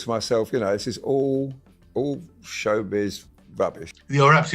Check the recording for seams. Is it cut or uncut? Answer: cut